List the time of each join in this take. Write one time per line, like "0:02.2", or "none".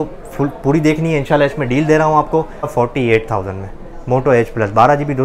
0:02.7